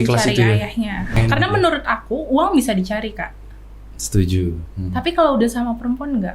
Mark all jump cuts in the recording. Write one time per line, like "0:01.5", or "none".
0:01.2